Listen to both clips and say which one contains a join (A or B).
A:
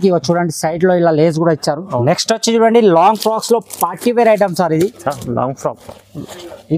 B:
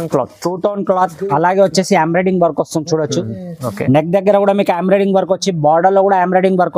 A